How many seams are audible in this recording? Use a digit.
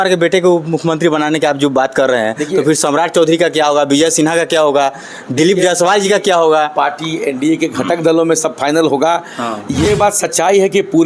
1